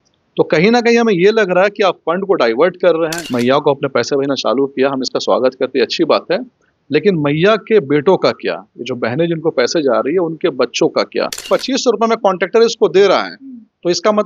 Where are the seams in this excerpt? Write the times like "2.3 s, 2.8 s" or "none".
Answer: 3.2 s, 11.5 s